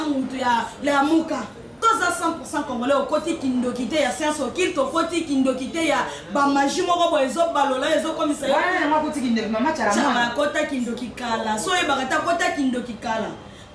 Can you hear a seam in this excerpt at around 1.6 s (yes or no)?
yes